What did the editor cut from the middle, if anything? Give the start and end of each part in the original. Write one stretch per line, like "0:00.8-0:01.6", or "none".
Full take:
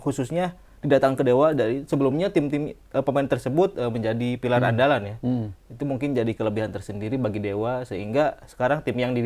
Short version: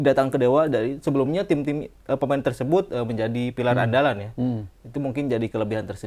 none